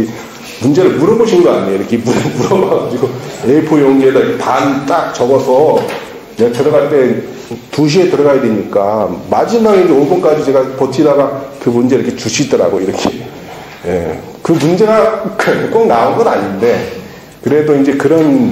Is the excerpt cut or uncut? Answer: uncut